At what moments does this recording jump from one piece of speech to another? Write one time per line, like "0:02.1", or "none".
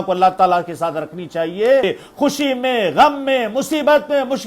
0:01.8